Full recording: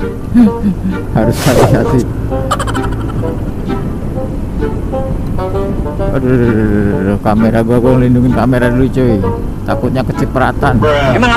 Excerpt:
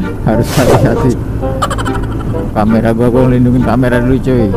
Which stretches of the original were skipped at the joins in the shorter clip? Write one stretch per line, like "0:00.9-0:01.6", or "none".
0:03.4-0:07.2